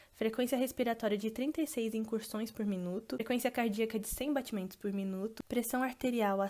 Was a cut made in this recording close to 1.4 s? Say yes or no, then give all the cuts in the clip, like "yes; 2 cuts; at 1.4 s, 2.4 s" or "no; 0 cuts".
no; 1 cut; at 3.2 s